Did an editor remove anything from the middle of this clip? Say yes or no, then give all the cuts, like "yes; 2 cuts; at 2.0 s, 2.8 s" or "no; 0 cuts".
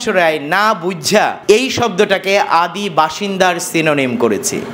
yes; 1 cut; at 1.4 s